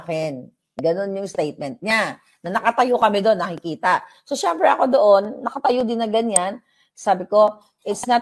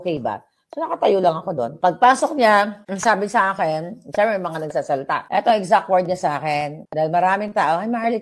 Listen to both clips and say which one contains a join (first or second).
second